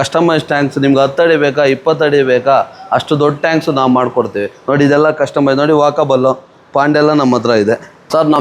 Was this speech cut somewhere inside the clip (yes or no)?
no